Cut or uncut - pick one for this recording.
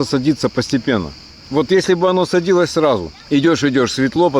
uncut